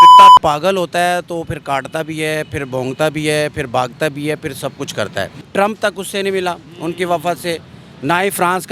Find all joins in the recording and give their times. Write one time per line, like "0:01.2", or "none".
0:05.3